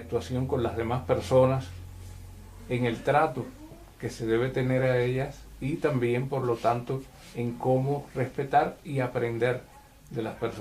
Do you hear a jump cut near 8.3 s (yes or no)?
yes